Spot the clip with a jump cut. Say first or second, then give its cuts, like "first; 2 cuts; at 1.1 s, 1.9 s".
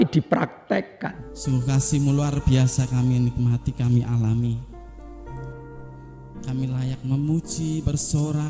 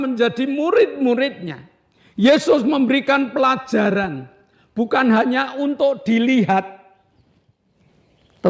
first; 1 cut; at 1.3 s